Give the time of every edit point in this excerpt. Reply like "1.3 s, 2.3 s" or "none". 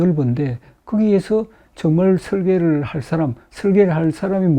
3.4 s

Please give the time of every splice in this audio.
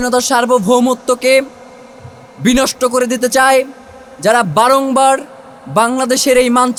none

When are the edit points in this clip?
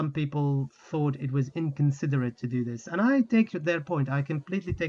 none

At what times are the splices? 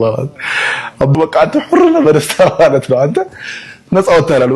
1.1 s

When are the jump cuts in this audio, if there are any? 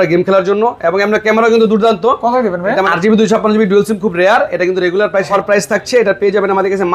2.9 s, 5.3 s

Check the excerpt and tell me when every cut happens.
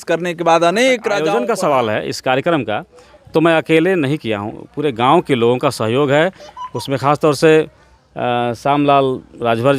1.3 s

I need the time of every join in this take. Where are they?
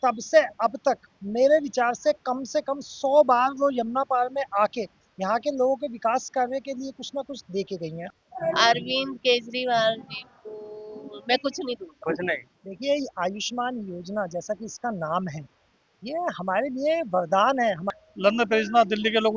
8.0 s, 12.6 s, 17.8 s

